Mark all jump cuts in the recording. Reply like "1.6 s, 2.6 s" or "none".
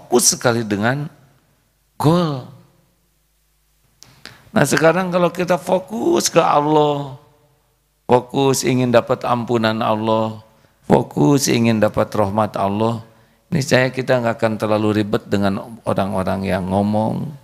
3.9 s